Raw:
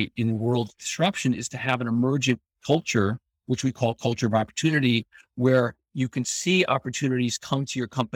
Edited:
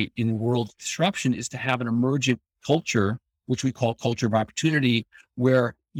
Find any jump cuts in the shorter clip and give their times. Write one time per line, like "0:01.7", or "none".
none